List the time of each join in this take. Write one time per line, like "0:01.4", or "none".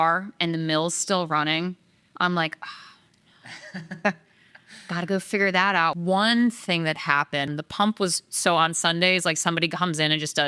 0:05.9
0:07.5